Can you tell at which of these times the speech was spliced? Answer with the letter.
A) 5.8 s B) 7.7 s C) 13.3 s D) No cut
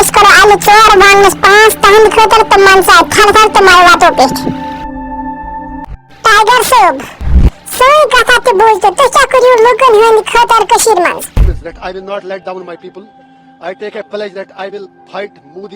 A